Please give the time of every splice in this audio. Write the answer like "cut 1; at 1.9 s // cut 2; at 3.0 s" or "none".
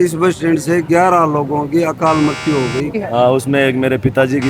cut 1; at 3.0 s